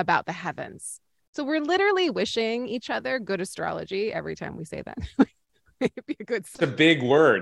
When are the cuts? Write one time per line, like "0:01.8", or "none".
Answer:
0:06.5